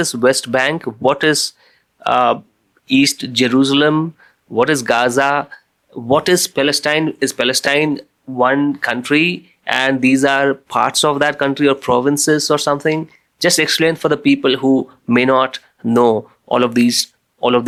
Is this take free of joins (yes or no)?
yes